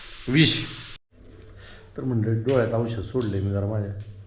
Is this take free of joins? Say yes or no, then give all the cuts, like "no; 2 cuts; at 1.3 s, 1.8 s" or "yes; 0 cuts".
no; 1 cut; at 1.2 s